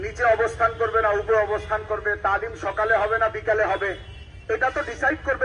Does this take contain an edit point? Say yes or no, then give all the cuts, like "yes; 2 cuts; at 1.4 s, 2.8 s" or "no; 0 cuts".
no; 0 cuts